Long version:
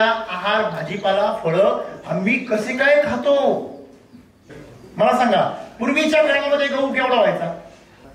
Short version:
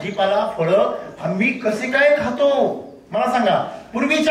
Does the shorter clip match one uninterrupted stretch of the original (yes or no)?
no